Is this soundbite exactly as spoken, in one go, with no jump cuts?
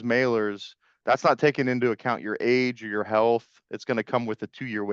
yes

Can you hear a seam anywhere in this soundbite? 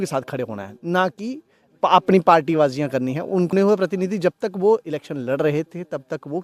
yes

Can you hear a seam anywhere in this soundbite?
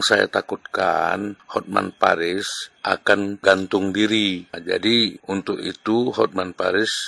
yes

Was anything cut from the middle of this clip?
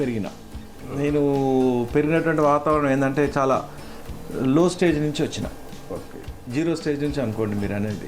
yes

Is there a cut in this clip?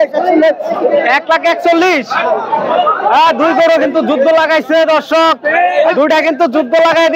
no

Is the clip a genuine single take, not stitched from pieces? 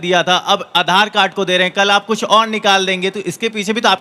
yes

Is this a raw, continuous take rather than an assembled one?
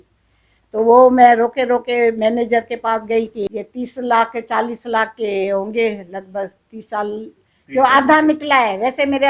no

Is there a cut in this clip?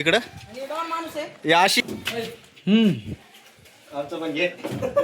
yes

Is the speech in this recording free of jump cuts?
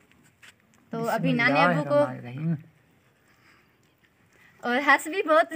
yes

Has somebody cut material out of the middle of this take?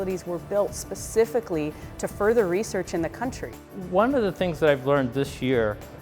yes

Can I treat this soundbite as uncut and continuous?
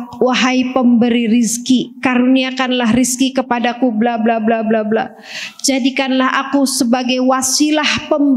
yes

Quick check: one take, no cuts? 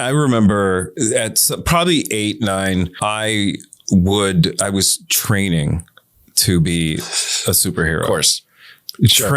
no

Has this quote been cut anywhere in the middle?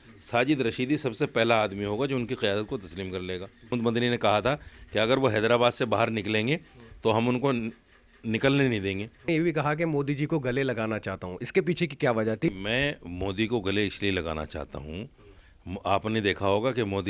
yes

